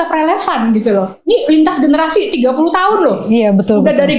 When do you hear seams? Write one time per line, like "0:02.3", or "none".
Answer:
none